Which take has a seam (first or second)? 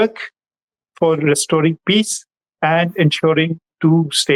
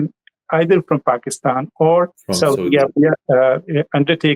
second